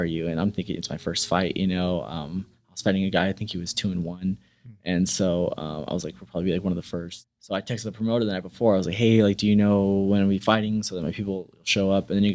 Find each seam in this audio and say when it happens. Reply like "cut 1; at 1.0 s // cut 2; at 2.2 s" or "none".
cut 1; at 7.1 s